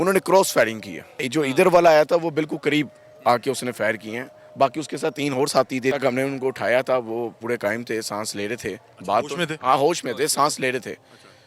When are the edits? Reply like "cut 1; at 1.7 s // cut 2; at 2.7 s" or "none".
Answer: cut 1; at 1.2 s // cut 2; at 5.9 s

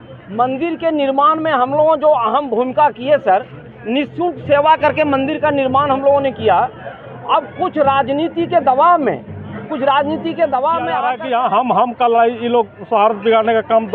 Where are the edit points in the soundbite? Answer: cut 1; at 11.0 s

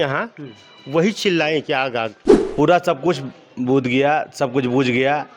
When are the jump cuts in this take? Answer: cut 1; at 2.4 s

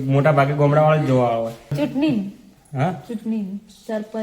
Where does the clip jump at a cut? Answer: cut 1; at 1.7 s

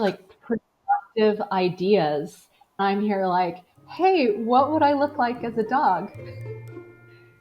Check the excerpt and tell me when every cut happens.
cut 1; at 2.8 s

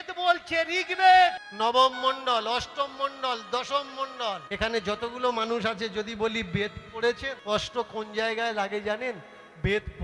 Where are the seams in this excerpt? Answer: cut 1; at 1.5 s // cut 2; at 4.5 s // cut 3; at 7.3 s

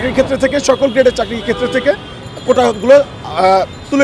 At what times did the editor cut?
none

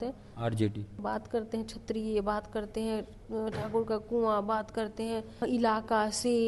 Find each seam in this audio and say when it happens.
cut 1; at 1.0 s // cut 2; at 5.4 s

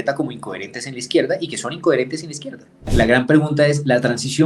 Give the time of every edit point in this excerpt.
cut 1; at 2.9 s

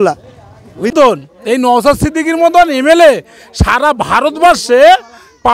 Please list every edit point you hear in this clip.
cut 1; at 0.9 s

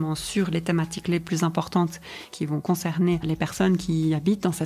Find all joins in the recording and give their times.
cut 1; at 2.3 s // cut 2; at 3.2 s

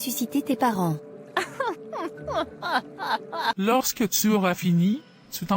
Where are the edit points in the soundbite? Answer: cut 1; at 3.6 s

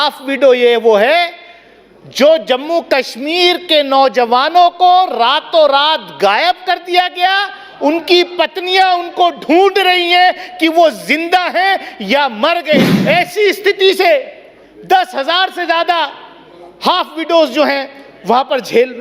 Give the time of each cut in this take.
cut 1; at 12.9 s

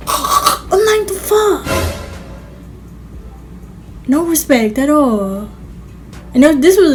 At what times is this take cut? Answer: none

